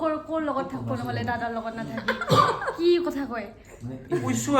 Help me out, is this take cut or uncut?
uncut